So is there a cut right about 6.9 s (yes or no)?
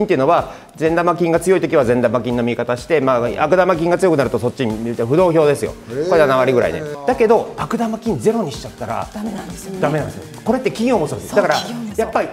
yes